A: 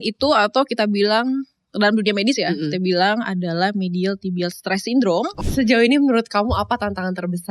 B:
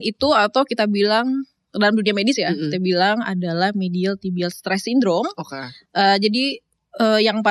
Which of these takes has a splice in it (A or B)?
A